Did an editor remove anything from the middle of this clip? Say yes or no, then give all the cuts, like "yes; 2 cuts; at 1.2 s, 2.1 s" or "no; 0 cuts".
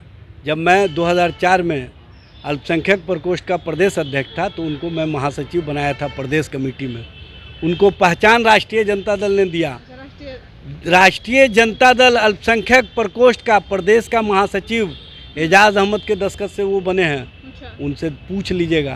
no; 0 cuts